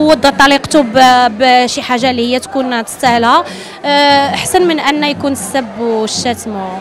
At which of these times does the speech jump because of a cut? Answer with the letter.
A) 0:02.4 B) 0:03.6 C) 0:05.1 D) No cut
D